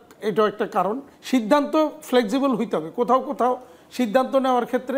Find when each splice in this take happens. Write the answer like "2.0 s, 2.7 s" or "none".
1.1 s